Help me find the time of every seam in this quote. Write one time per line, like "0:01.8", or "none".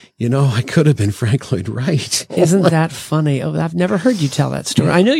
0:02.3